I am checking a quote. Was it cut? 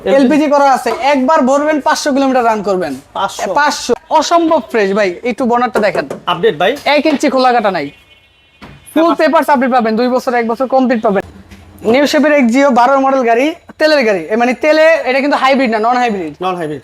yes; 2 cuts; at 4.0 s, 11.3 s

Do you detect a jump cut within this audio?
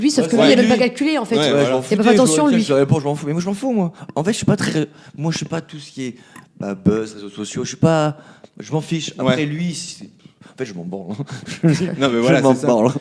no; 0 cuts

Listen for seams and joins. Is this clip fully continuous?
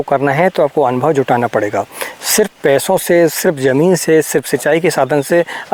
yes; 0 cuts

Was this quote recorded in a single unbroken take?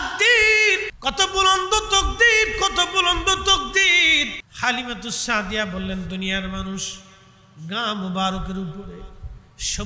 no; 2 cuts; at 0.9 s, 4.4 s

